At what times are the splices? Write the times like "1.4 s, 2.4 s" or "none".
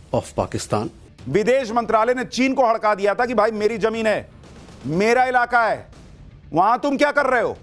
1.0 s